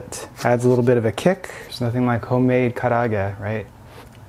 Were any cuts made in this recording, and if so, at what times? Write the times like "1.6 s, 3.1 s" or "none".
1.5 s

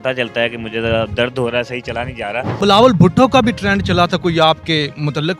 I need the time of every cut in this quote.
2.5 s

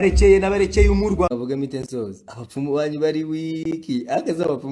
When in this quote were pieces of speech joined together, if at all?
1.3 s

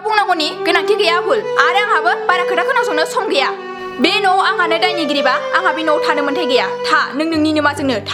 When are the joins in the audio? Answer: none

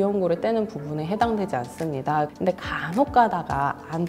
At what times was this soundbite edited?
2.3 s

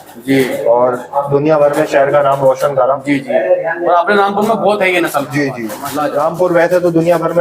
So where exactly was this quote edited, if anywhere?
5.8 s

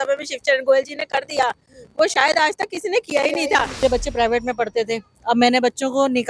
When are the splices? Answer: 3.8 s

